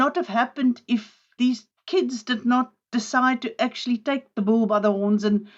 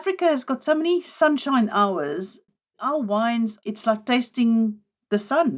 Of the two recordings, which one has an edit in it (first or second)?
second